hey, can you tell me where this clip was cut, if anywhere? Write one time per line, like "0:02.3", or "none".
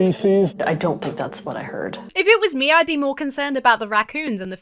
0:02.0